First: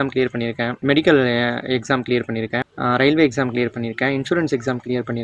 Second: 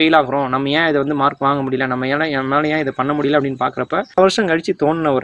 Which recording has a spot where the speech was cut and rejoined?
second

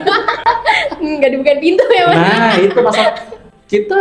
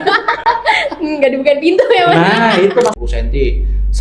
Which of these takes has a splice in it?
second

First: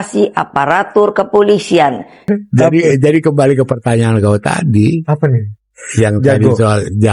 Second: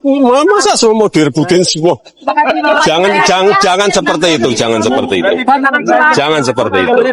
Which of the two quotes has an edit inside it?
first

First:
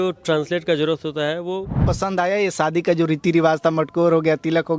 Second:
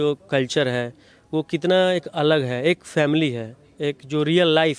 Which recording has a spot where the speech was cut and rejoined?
first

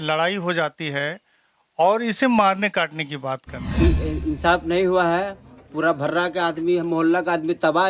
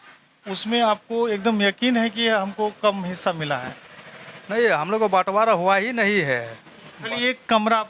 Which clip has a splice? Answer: first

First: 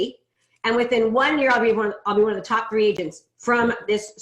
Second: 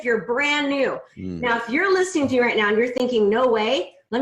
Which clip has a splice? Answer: second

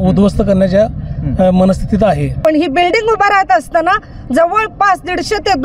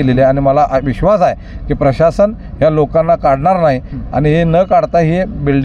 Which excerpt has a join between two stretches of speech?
first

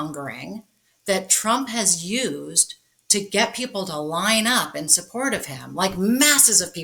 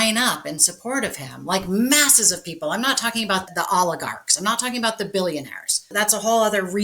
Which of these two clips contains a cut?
second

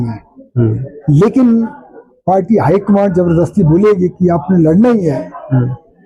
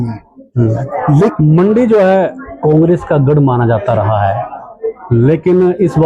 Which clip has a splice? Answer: second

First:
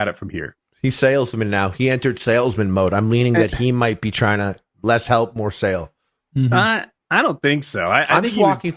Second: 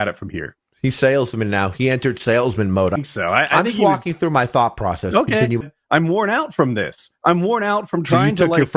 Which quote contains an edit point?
second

